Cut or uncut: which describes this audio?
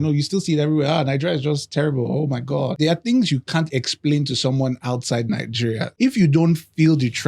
cut